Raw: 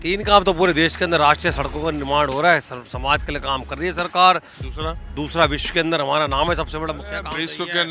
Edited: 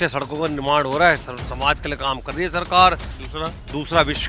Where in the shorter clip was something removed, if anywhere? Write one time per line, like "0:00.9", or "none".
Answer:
none